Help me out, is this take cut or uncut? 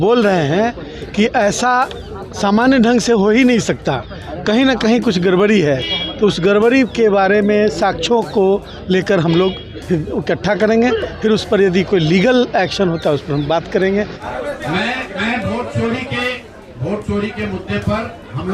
cut